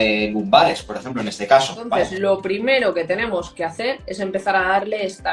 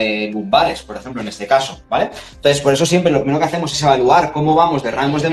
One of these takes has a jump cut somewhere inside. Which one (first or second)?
first